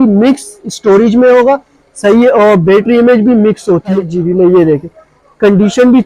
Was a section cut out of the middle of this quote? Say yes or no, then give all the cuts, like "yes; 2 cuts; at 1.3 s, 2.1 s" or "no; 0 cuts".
yes; 1 cut; at 4.1 s